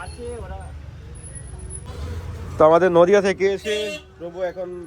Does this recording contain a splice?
yes; 1 cut; at 1.9 s

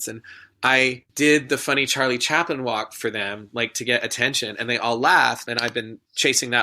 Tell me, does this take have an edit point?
yes; 2 cuts; at 1.1 s, 5.4 s

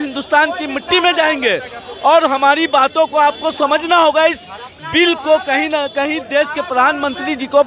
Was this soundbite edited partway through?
no; 0 cuts

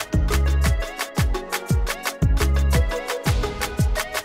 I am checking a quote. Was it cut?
no; 0 cuts

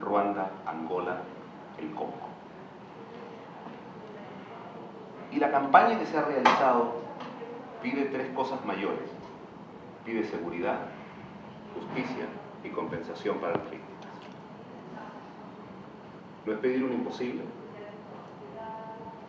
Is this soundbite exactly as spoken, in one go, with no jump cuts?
yes; 0 cuts

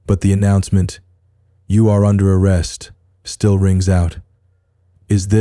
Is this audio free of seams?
yes; 0 cuts

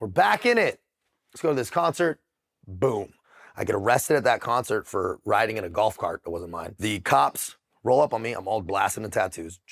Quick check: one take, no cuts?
no; 2 cuts; at 3.2 s, 6.7 s

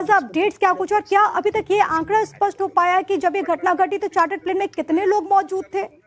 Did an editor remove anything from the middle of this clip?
yes; 1 cut; at 3.6 s

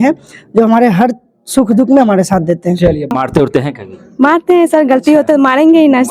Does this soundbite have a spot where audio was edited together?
yes; 1 cut; at 3.1 s

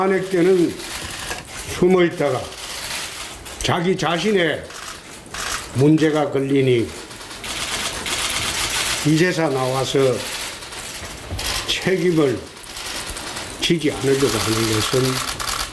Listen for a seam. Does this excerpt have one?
no; 0 cuts

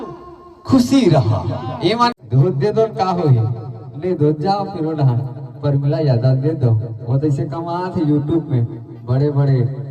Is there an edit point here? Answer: yes; 1 cut; at 2.2 s

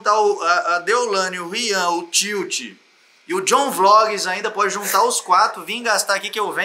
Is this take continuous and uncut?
yes; 0 cuts

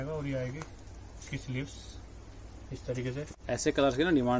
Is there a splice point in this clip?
yes; 1 cut; at 3.3 s

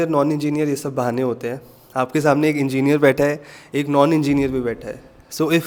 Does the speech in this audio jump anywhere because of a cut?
no; 0 cuts

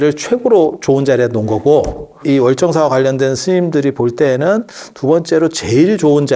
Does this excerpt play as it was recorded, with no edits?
no; 1 cut; at 2.2 s

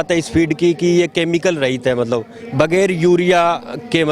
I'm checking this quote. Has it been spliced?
no; 0 cuts

